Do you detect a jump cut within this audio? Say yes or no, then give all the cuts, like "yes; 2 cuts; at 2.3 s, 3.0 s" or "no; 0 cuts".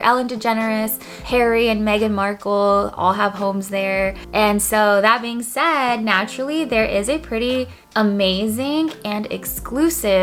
no; 0 cuts